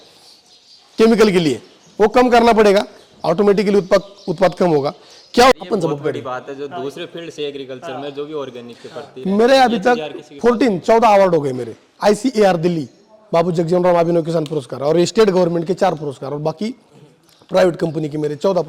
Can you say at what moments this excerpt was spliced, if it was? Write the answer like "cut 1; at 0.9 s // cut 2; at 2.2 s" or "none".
cut 1; at 5.5 s